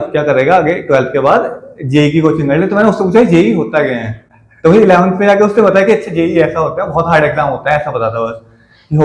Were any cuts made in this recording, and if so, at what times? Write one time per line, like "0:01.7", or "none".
none